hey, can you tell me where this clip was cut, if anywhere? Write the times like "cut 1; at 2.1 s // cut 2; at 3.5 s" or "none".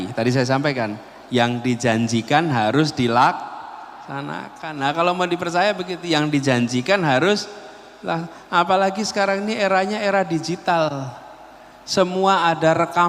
none